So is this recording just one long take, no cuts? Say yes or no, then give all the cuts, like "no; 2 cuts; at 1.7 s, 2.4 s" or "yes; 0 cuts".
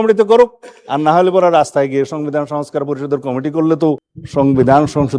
no; 1 cut; at 4.1 s